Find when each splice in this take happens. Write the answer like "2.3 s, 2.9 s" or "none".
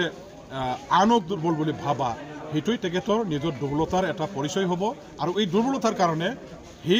1.4 s